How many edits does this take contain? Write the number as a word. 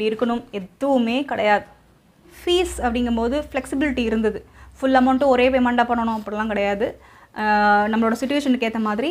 one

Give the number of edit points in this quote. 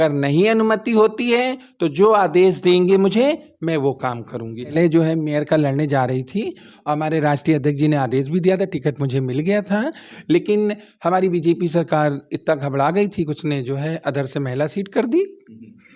one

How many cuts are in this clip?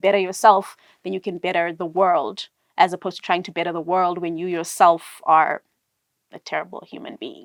zero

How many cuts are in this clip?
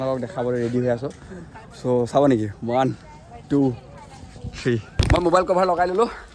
one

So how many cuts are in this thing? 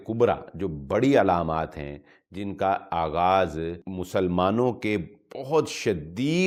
zero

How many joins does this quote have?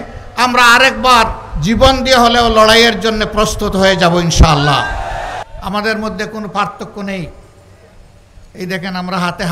one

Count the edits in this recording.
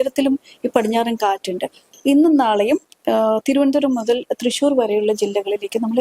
one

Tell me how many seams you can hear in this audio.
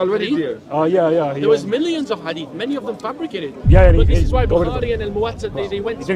zero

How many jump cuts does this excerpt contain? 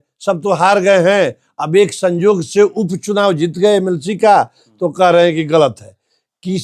zero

